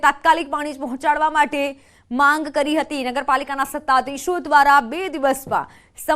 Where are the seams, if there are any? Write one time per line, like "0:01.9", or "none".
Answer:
0:03.2